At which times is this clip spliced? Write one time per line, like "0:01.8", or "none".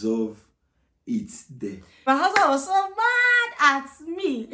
0:02.0

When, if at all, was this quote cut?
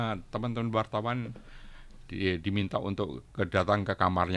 none

